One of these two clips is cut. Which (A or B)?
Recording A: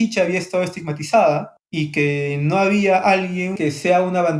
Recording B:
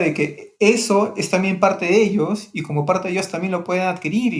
A